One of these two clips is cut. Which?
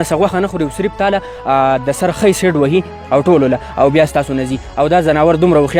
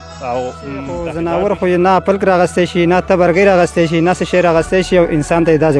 second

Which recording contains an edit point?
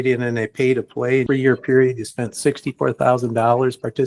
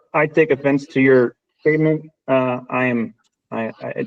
first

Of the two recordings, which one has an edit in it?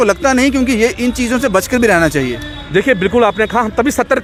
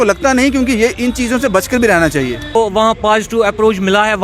second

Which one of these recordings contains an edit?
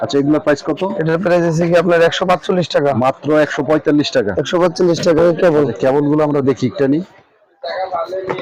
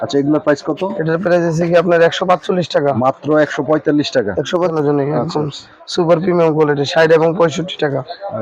second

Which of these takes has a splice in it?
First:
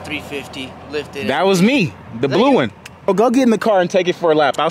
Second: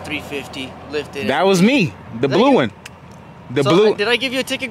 first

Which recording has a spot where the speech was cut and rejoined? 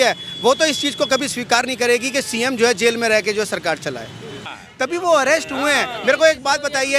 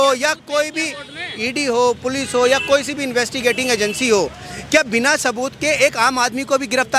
first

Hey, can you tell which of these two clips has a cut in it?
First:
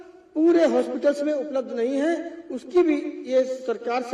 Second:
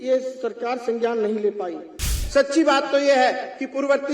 second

